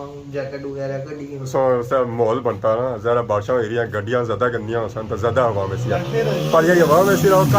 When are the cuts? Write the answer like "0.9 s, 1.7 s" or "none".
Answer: 1.5 s